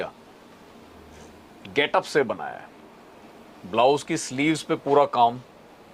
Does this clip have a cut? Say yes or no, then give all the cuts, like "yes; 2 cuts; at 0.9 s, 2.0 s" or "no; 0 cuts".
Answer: no; 0 cuts